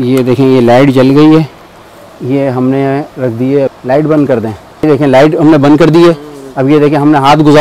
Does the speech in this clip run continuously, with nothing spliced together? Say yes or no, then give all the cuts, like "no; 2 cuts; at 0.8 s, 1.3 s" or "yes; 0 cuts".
yes; 0 cuts